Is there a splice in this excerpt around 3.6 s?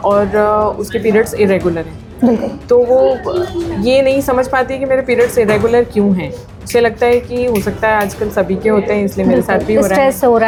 no; 0 cuts

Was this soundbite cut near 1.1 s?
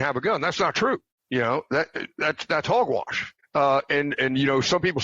yes; 2 cuts; at 1.1 s, 3.3 s

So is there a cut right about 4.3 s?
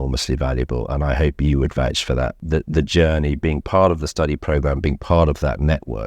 no; 1 cut; at 2.4 s

